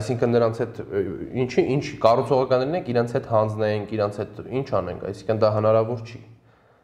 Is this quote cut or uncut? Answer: uncut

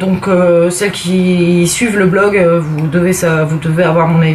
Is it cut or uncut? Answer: uncut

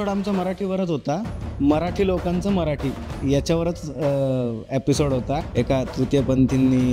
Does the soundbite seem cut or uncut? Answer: cut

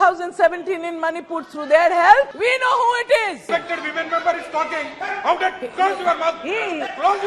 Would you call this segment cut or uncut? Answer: cut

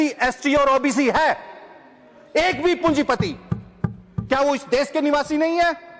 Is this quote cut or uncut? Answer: uncut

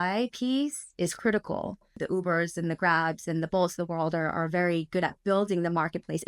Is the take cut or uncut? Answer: cut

